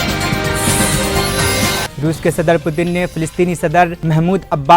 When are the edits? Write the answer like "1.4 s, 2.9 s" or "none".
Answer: 1.9 s